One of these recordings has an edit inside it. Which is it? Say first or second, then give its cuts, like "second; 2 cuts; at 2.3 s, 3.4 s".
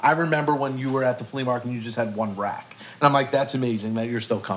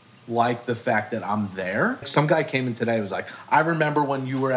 second; 1 cut; at 2.1 s